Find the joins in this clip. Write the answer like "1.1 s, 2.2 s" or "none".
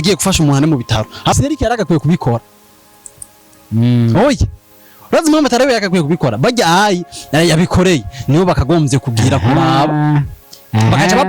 1.3 s